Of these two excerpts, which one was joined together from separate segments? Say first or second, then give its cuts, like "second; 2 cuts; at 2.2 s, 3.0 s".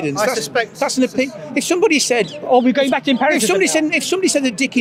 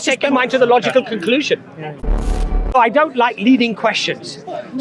second; 1 cut; at 2.4 s